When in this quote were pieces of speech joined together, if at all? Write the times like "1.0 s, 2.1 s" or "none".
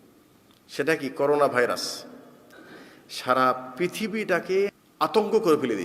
4.8 s